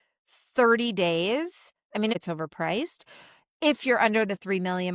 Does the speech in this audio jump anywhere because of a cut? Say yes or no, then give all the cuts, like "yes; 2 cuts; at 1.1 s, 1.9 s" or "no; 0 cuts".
yes; 1 cut; at 2.2 s